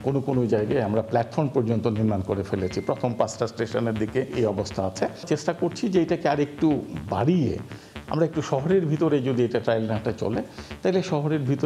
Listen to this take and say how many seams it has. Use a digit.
2